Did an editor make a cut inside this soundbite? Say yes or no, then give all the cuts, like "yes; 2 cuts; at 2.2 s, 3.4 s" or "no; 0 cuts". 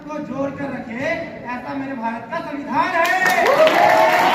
no; 0 cuts